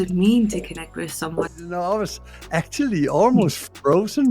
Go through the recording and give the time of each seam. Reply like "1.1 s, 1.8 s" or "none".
1.5 s